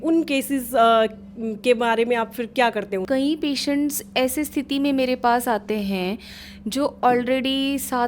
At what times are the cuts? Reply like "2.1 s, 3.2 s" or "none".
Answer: 3.0 s